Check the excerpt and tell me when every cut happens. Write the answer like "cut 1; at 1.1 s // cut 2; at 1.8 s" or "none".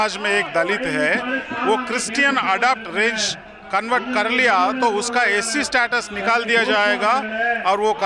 none